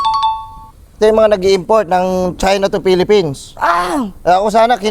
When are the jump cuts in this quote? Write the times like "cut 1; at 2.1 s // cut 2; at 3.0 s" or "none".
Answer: none